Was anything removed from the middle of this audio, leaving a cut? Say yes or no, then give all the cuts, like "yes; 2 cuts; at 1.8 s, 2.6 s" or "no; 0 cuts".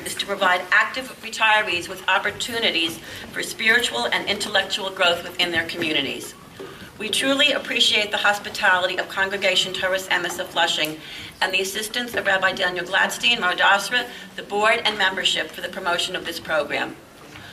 yes; 1 cut; at 4.3 s